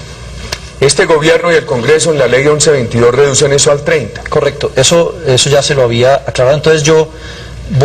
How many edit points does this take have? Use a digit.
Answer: 1